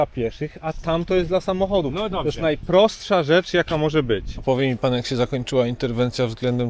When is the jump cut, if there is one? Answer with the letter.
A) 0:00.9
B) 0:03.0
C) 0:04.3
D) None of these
C